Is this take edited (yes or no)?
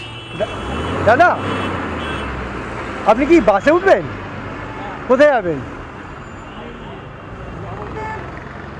no